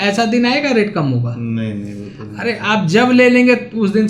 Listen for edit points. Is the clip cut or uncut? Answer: uncut